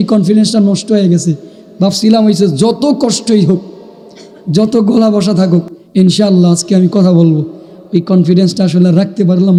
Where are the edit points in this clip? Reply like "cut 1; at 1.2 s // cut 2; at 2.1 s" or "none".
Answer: none